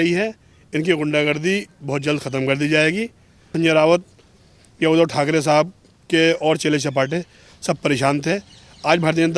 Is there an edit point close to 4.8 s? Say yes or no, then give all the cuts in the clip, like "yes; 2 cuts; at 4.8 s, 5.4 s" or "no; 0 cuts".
no; 1 cut; at 3.5 s